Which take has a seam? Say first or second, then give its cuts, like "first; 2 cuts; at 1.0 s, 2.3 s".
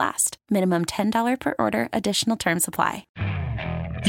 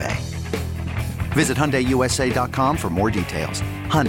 first; 1 cut; at 3.1 s